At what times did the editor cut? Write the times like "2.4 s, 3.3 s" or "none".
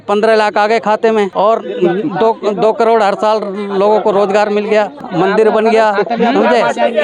1.3 s, 5.1 s